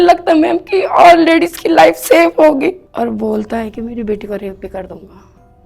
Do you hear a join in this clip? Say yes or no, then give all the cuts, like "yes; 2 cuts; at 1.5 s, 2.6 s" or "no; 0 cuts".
yes; 1 cut; at 2.9 s